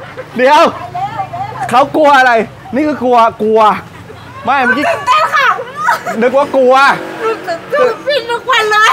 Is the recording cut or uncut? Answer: uncut